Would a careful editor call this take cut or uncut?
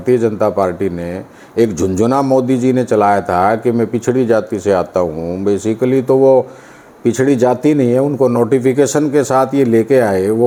uncut